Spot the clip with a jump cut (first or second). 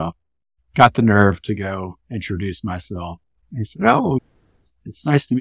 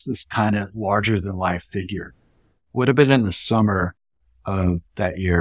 second